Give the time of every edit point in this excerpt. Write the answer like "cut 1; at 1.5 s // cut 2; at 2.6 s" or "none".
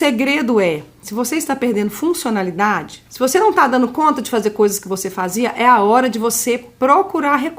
cut 1; at 3.0 s